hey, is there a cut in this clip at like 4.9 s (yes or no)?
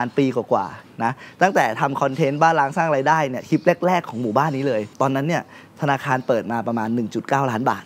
yes